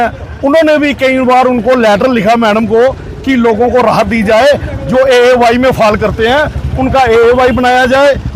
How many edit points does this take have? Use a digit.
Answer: 0